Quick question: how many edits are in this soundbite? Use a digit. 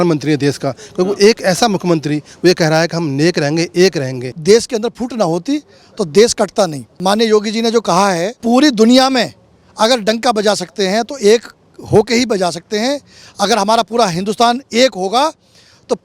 3